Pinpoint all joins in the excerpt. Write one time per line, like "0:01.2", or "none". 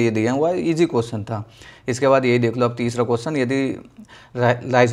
none